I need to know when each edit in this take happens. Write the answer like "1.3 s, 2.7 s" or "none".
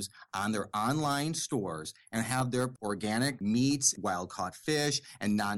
2.8 s, 3.9 s